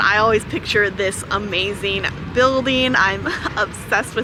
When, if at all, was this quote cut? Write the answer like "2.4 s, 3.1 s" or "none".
none